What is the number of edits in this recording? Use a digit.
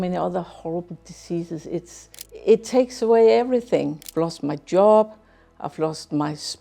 2